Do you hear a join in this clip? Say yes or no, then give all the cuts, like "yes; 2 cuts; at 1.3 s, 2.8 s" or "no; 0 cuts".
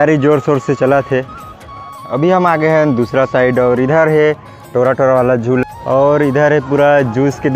yes; 2 cuts; at 2.0 s, 5.6 s